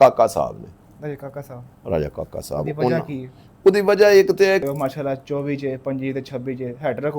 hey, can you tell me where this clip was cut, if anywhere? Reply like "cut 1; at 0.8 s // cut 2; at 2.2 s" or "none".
cut 1; at 4.6 s